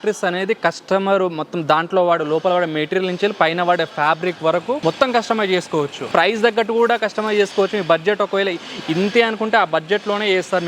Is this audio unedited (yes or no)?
no